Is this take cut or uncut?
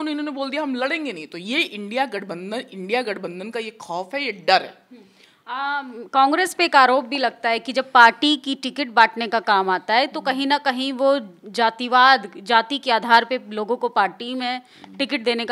uncut